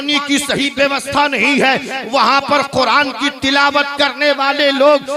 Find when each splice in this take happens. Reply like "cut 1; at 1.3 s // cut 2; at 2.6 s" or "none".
none